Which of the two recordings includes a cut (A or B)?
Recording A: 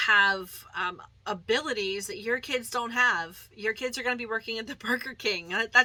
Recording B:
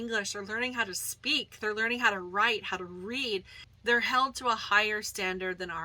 B